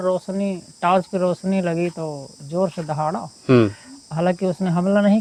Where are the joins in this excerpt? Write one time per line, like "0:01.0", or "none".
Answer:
none